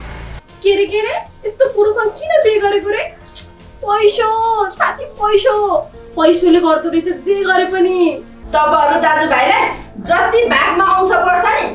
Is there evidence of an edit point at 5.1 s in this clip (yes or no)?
no